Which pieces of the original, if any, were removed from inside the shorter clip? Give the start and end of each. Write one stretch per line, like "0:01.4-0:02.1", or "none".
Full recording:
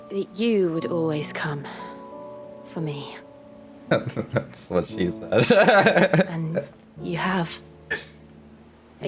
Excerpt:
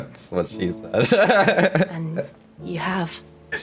none